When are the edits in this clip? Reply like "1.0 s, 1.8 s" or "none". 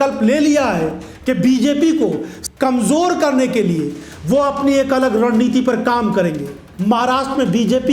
2.3 s, 6.6 s